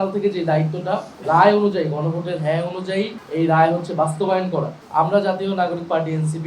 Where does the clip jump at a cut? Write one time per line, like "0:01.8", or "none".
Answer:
0:01.1
0:03.2
0:04.8